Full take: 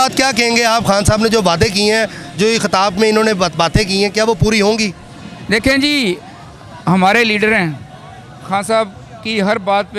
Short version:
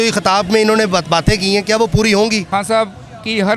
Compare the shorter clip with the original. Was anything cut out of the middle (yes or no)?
yes